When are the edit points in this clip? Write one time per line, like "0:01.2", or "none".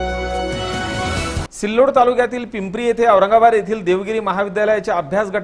0:01.5